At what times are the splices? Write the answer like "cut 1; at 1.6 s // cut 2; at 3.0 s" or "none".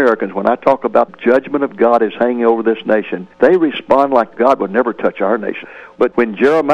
cut 1; at 3.2 s // cut 2; at 4.3 s // cut 3; at 5.6 s